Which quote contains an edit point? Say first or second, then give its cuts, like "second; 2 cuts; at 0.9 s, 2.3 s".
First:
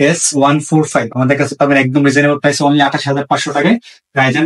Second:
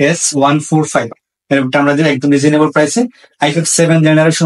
second; 1 cut; at 1.1 s